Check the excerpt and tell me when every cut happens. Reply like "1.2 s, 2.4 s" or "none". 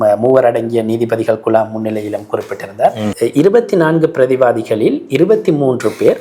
3.1 s